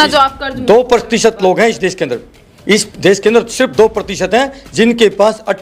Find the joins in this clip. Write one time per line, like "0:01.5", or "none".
none